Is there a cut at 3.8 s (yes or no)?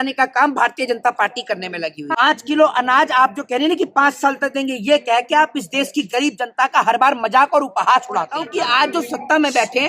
no